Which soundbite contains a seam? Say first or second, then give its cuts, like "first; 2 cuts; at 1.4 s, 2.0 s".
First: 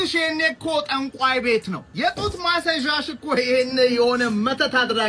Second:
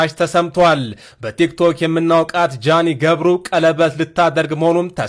first; 1 cut; at 1.8 s